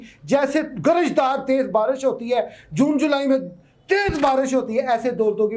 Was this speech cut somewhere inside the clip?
no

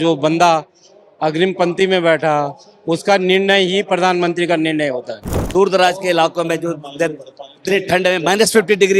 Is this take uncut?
no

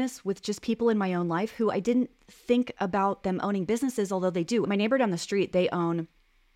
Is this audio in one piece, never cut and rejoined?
no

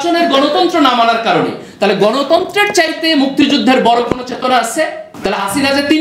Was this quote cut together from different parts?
yes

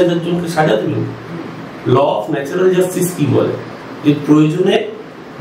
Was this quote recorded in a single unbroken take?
yes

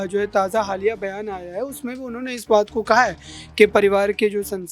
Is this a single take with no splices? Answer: yes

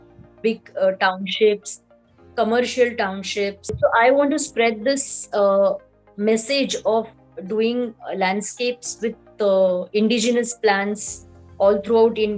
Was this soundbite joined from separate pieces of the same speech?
yes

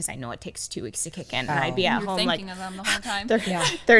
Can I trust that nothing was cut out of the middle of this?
yes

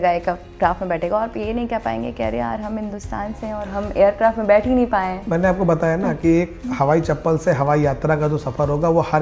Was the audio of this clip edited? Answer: no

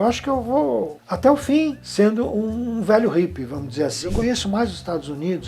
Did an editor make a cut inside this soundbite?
yes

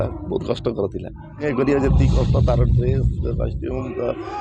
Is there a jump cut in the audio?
yes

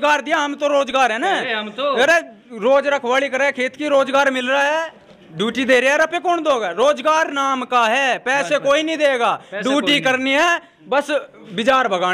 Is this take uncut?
yes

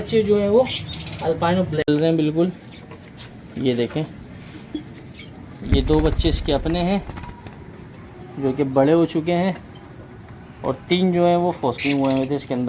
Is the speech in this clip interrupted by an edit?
yes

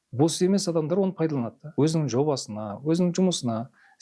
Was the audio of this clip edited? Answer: yes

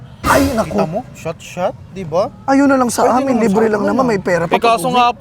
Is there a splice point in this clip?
no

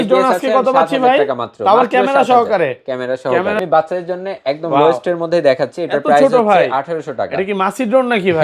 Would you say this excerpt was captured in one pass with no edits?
no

